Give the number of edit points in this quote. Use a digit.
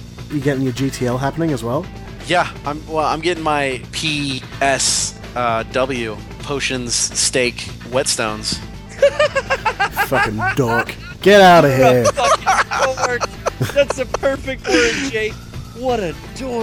3